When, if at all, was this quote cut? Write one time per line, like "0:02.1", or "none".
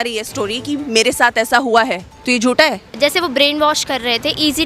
0:02.1
0:02.9